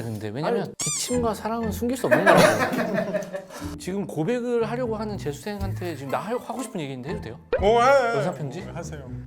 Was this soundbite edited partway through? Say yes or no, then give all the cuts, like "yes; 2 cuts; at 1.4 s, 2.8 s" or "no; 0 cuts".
yes; 1 cut; at 3.7 s